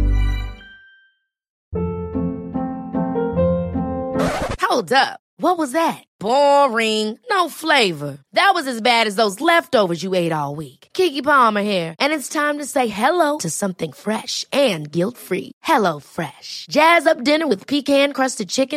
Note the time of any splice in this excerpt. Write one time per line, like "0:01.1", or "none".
0:01.5